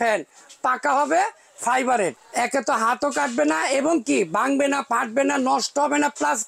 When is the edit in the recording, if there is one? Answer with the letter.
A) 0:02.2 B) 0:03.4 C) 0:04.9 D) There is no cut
A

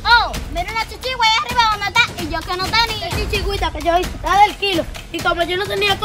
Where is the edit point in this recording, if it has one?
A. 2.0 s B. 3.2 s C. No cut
B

